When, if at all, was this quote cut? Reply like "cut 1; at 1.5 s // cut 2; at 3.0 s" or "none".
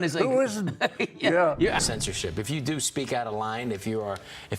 cut 1; at 1.9 s